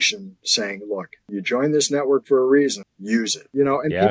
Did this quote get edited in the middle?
yes; 2 cuts; at 1.2 s, 3.3 s

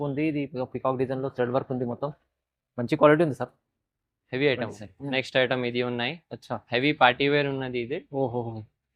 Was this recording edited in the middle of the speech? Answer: yes; 1 cut; at 4.8 s

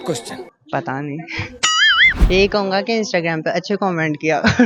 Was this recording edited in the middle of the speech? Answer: yes; 1 cut; at 2.3 s

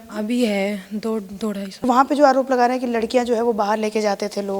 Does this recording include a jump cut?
yes; 1 cut; at 1.7 s

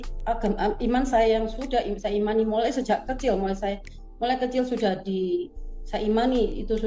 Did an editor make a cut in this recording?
yes; 1 cut; at 3.6 s

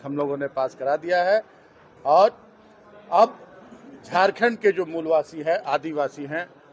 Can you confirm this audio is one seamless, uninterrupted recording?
yes; 0 cuts

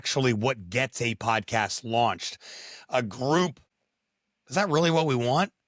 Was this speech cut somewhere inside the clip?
yes; 1 cut; at 3.6 s

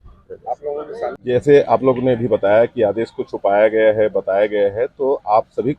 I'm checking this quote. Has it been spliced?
yes; 1 cut; at 1.1 s

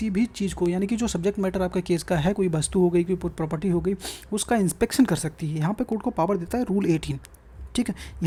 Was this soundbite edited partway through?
no; 0 cuts

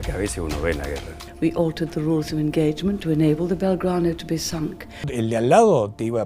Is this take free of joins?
no; 2 cuts; at 1.2 s, 5.1 s

